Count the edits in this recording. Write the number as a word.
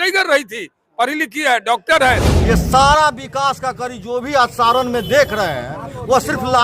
one